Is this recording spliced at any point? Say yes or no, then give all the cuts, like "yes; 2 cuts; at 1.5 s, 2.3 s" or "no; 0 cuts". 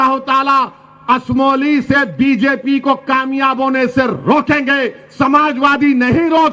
no; 0 cuts